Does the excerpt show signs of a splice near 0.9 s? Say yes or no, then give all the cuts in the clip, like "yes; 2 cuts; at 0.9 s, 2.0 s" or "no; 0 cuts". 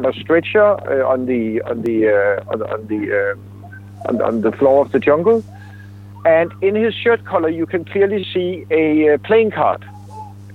no; 0 cuts